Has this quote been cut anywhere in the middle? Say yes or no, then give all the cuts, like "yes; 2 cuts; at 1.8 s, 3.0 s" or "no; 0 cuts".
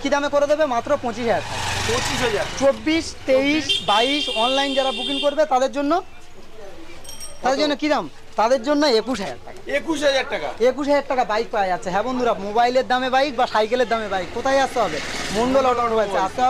no; 0 cuts